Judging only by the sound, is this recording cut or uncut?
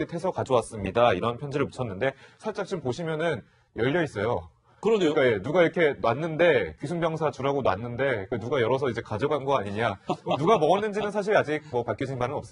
uncut